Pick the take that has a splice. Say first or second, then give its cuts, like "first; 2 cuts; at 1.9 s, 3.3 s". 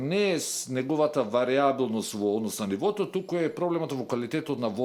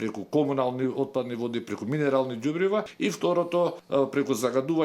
second; 2 cuts; at 2.9 s, 3.8 s